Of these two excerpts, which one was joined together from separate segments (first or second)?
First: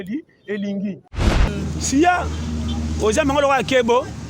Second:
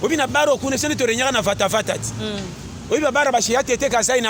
first